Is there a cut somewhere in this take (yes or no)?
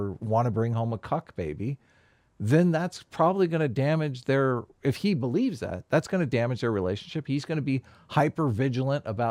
no